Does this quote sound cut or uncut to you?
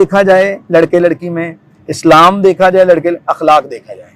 uncut